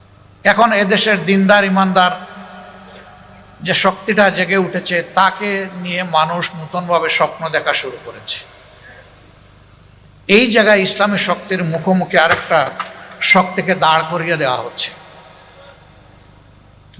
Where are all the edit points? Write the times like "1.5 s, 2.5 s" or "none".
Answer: none